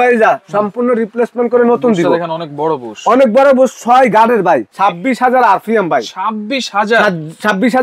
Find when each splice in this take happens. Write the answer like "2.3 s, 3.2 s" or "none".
4.7 s

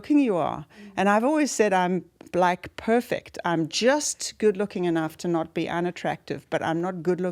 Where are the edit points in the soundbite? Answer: none

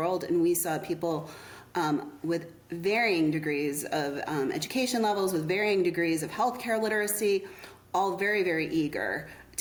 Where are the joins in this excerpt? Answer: none

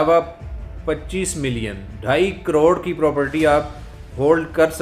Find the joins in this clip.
none

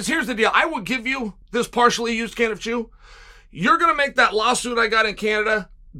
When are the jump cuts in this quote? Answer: 1.4 s

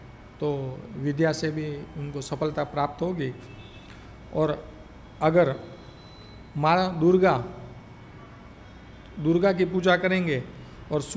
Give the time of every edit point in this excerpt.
none

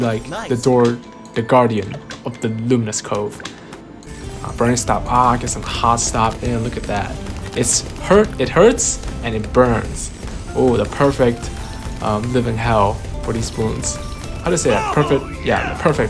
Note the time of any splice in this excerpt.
4.1 s

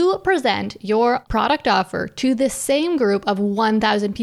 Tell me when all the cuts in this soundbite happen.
1.2 s

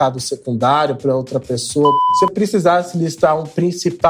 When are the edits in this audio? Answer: 2.0 s

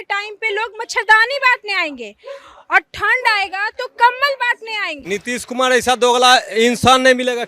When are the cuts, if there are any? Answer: 4.9 s

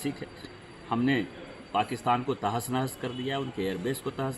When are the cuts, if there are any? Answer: none

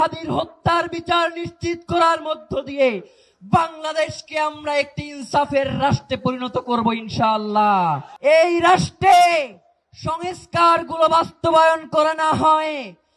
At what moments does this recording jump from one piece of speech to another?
8.1 s

